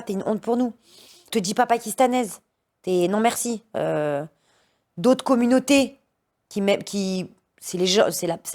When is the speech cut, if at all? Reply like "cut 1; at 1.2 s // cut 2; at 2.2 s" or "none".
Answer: cut 1; at 1.3 s